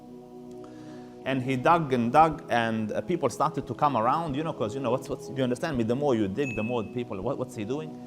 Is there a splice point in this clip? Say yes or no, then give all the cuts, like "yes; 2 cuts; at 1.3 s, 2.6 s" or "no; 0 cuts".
yes; 1 cut; at 1.0 s